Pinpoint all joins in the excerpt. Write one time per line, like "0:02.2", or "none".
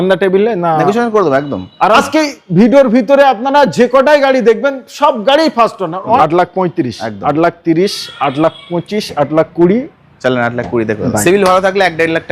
0:02.0
0:06.2
0:11.1